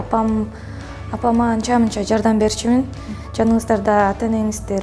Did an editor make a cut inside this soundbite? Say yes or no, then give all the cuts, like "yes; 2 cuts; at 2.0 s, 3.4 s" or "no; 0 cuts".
yes; 1 cut; at 3.2 s